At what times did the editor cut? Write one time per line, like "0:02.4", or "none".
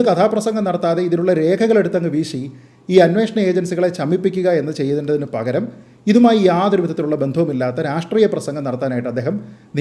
none